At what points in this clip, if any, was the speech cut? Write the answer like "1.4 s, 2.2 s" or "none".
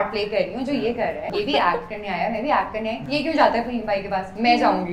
1.3 s, 3.0 s